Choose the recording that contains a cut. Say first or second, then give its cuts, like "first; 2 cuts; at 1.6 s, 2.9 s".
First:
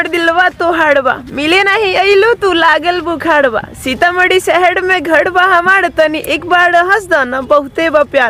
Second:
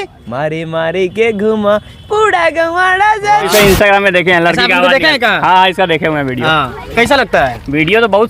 second; 1 cut; at 3.5 s